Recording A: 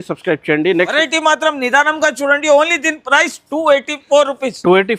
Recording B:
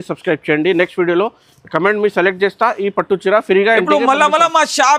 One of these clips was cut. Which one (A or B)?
A